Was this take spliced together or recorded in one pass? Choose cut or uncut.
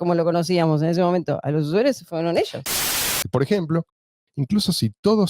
cut